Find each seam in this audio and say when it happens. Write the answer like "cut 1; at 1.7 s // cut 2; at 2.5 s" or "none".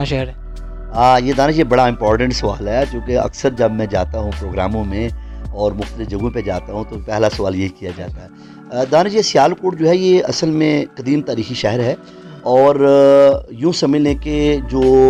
none